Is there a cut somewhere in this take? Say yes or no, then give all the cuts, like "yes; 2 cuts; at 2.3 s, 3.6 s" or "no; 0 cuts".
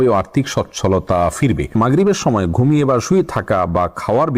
yes; 1 cut; at 1.7 s